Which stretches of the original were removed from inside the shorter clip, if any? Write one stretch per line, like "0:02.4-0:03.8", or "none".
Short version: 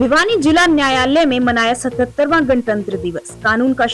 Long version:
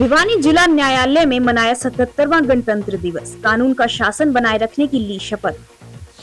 none